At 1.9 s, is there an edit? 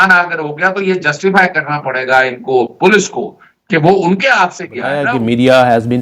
no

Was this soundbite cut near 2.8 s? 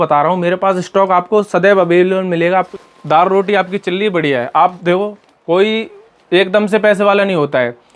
yes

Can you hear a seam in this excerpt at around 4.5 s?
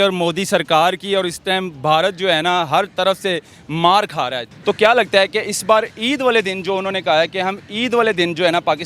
yes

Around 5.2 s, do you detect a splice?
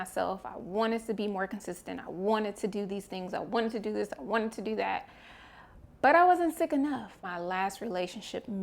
no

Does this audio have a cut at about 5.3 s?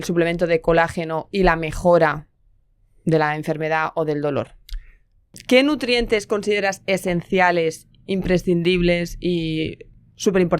yes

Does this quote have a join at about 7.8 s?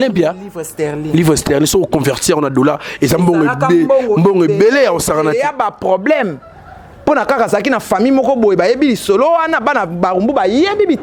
no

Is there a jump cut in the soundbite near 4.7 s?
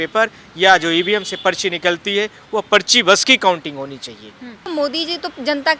yes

